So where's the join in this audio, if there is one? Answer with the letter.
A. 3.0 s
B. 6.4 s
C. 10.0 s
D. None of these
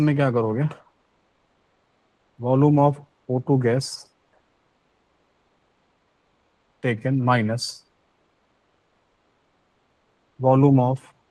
D